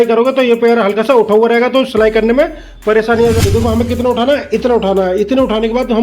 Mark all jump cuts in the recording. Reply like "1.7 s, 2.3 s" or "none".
3.4 s